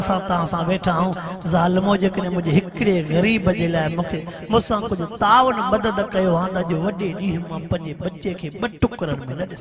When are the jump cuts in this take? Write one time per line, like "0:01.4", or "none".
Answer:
none